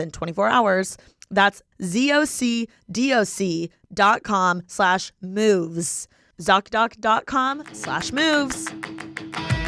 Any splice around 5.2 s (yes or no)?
no